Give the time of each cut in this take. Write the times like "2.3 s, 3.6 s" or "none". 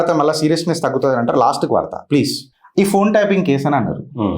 2.4 s